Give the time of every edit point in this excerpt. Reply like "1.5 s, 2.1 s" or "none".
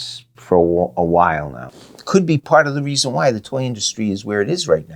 1.7 s